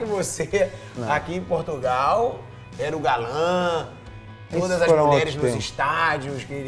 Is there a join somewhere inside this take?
no; 0 cuts

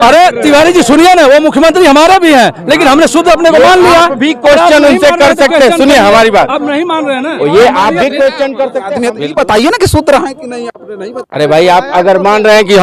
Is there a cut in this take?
yes; 1 cut; at 8.8 s

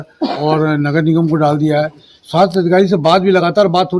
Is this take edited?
no; 0 cuts

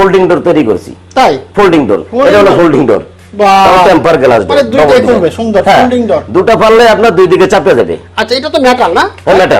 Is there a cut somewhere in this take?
no; 0 cuts

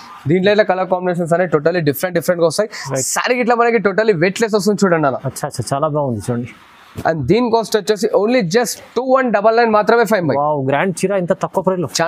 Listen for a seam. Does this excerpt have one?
no; 0 cuts

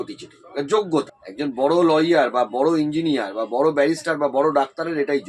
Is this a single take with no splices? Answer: no; 1 cut; at 1.2 s

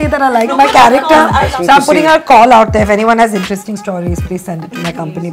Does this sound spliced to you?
yes; 1 cut; at 1.5 s

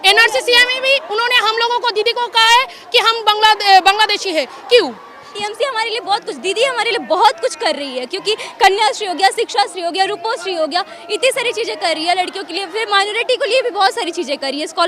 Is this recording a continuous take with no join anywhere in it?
no; 1 cut; at 5.4 s

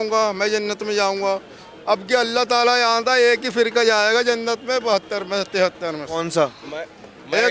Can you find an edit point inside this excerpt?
no; 0 cuts

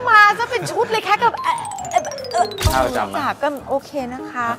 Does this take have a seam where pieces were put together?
yes; 1 cut; at 2.7 s

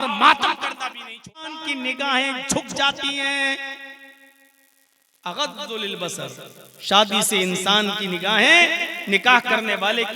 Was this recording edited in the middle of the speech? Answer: yes; 1 cut; at 1.6 s

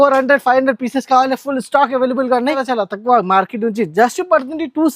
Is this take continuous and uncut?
no; 1 cut; at 2.6 s

